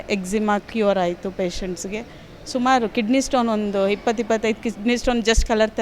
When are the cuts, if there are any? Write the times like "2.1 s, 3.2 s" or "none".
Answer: none